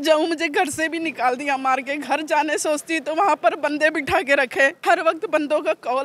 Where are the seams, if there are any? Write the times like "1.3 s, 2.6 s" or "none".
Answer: 4.8 s